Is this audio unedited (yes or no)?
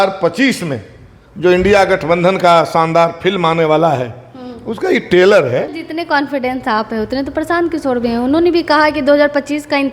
no